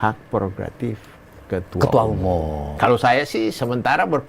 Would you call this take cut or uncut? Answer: cut